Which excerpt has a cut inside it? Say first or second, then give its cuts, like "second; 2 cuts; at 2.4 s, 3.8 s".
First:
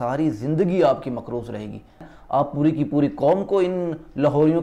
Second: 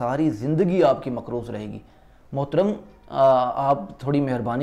first; 1 cut; at 2.1 s